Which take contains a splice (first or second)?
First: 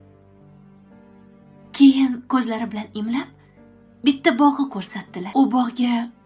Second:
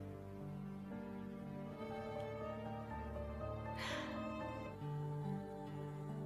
first